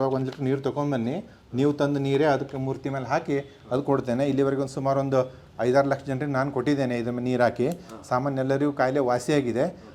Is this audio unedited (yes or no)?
yes